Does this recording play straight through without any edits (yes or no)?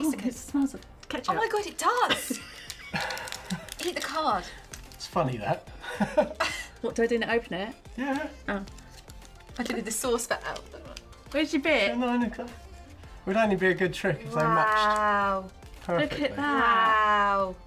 yes